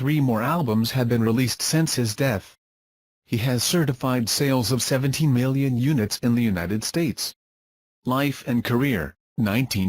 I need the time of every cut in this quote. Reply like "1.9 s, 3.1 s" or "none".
6.0 s